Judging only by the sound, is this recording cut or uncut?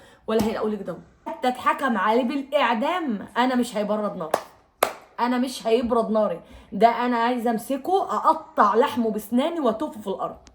cut